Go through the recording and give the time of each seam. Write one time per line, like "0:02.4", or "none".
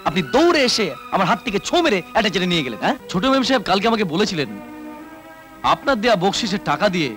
0:03.0